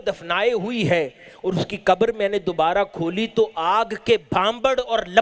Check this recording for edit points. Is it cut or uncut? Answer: uncut